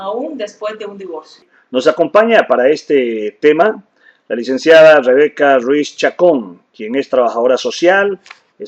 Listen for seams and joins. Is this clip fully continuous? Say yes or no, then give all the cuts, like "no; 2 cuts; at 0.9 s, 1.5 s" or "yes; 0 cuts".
no; 1 cut; at 6.0 s